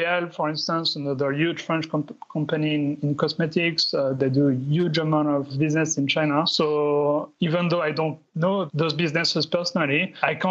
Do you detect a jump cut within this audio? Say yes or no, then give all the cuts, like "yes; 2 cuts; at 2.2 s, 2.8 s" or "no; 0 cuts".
no; 0 cuts